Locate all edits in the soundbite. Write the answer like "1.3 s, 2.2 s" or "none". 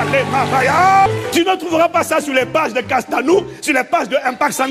1.1 s